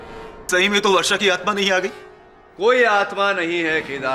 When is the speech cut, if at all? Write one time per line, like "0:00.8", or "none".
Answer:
none